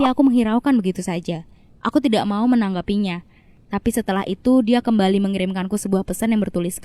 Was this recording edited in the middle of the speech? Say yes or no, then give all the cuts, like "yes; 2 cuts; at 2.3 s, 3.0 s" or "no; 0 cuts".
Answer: no; 0 cuts